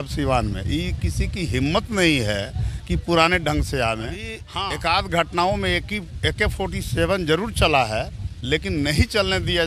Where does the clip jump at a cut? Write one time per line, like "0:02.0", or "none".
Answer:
0:04.4